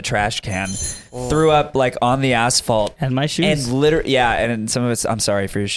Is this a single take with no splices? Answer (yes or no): yes